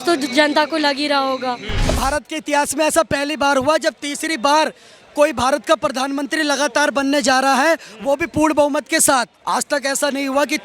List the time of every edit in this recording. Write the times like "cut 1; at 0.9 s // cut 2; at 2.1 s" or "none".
cut 1; at 2.0 s // cut 2; at 9.4 s